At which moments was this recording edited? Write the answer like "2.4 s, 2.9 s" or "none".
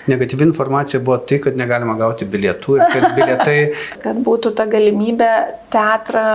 3.9 s

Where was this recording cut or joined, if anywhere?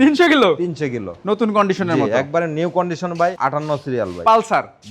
1.1 s, 4.1 s

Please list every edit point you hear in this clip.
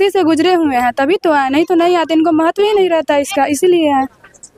none

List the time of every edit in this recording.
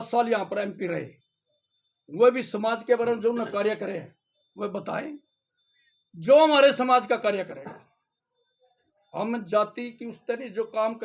none

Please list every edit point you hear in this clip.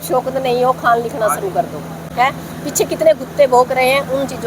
2.1 s

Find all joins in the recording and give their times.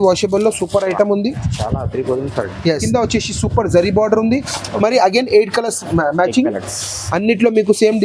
2.8 s

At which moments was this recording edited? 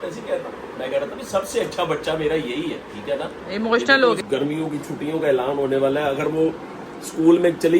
4.2 s

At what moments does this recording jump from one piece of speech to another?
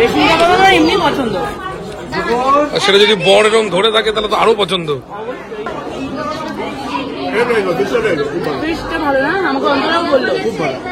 none

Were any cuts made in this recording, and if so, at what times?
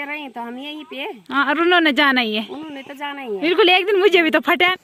none

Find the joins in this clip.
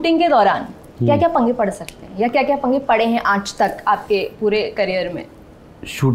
none

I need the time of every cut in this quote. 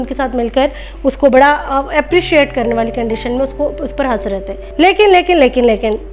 4.6 s

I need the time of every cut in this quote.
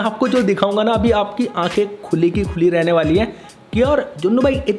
none

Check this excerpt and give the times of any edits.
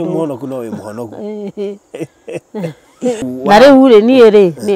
3.2 s

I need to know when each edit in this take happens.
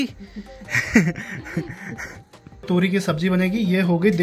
2.6 s

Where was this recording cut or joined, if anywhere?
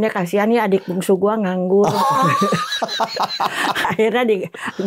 3.9 s

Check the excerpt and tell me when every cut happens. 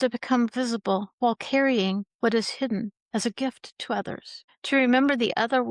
none

